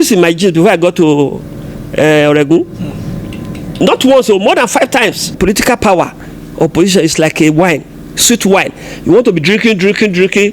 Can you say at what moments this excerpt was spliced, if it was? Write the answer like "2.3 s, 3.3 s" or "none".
5.3 s